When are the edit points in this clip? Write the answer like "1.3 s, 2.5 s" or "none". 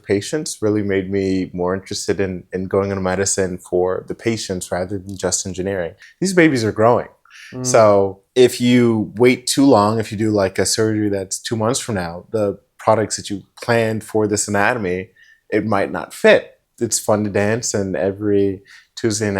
6.0 s, 8.2 s, 16.6 s

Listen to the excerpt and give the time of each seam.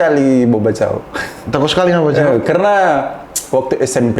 none

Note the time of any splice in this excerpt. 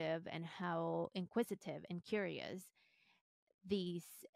none

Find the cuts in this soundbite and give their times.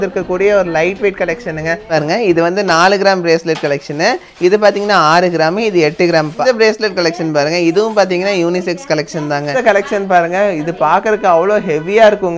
1.9 s, 6.3 s, 9.5 s

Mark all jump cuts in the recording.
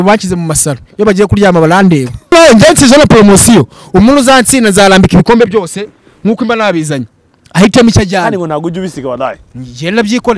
2.3 s

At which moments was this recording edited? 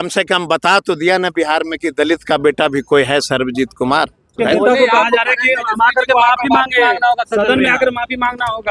4.3 s

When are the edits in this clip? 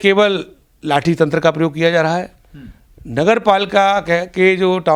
none

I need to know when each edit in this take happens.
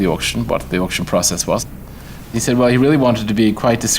2.2 s

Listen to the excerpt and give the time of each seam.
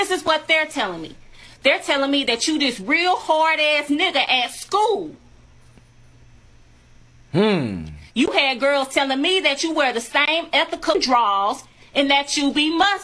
10.9 s

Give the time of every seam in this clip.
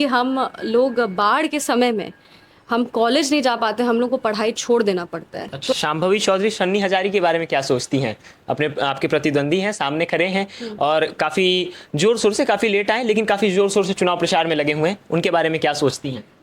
5.7 s

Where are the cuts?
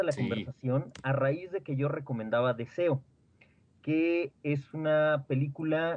0.9 s

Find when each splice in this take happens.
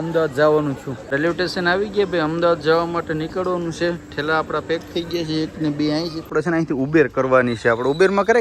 1.0 s, 6.2 s

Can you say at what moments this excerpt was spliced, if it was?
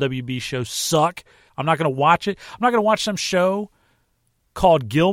1.5 s

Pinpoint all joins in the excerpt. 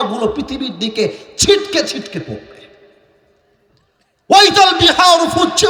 none

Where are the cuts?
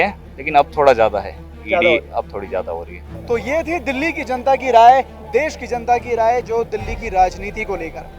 none

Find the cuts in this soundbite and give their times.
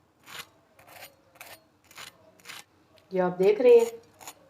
2.7 s

